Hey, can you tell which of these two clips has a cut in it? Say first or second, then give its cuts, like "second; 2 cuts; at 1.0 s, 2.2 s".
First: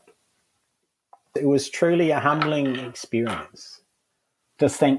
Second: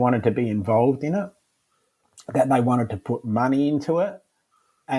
first; 1 cut; at 1.3 s